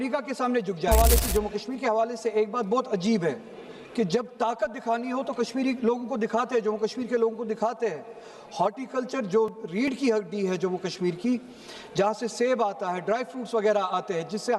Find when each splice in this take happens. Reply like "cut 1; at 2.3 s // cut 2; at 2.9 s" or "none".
cut 1; at 0.9 s